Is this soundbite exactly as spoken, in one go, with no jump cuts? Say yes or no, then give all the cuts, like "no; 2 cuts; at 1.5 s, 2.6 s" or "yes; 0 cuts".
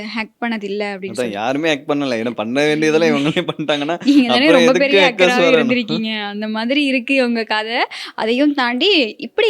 yes; 0 cuts